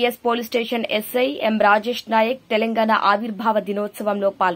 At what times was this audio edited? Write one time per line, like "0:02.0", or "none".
none